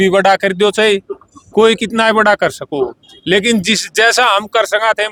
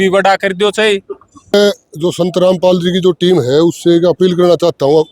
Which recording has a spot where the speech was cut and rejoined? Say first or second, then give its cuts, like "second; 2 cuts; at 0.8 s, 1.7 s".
second; 1 cut; at 1.6 s